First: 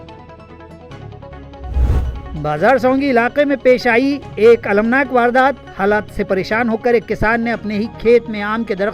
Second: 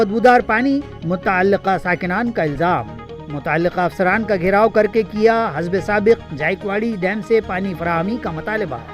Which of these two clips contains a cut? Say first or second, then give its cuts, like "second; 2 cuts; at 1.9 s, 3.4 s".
first; 1 cut; at 2.2 s